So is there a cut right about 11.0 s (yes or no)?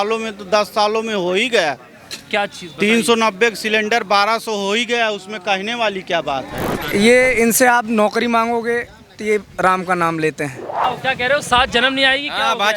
yes